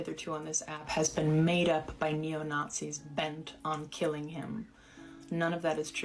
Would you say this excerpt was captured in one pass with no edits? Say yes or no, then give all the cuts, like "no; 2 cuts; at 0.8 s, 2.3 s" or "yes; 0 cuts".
no; 1 cut; at 2.7 s